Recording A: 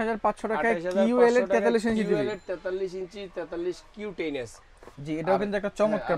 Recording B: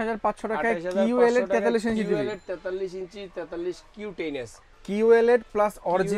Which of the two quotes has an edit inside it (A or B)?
B